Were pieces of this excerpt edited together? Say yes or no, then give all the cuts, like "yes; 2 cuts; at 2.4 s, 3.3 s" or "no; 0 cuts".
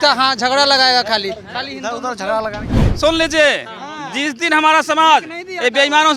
yes; 1 cut; at 2.8 s